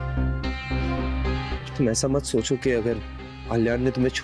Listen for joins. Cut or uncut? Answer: cut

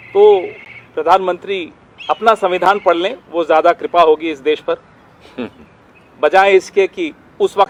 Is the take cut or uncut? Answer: uncut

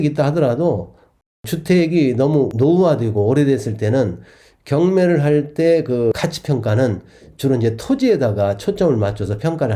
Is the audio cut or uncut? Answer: uncut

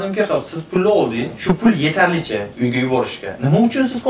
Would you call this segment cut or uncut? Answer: cut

